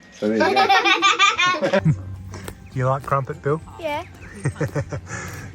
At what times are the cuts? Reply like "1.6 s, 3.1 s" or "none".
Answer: 1.8 s